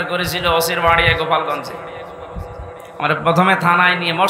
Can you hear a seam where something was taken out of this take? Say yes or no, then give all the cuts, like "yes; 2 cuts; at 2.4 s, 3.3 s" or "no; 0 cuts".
no; 0 cuts